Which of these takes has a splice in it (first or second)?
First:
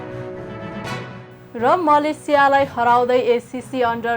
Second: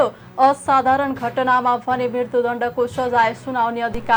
first